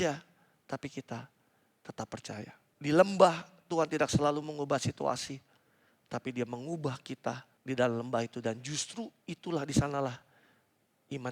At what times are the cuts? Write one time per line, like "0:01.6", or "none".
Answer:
0:02.6
0:07.5